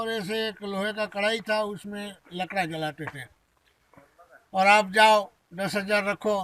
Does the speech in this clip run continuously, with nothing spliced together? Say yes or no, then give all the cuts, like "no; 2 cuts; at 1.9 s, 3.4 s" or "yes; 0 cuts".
yes; 0 cuts